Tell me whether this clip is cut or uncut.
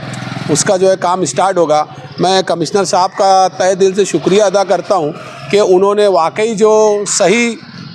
uncut